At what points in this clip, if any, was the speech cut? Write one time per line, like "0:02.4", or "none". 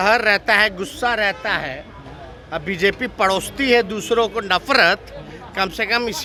none